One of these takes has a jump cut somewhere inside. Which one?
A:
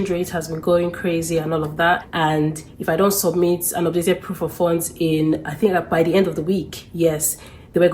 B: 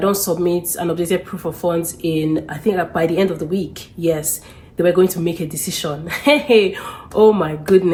A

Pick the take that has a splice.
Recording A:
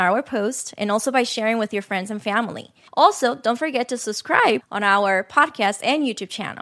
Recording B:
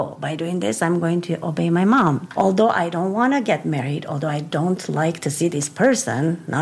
B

